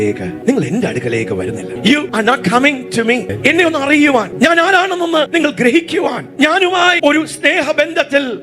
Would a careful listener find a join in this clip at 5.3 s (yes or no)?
yes